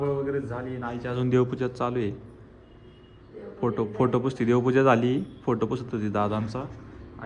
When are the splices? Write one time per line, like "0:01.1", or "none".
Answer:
0:02.2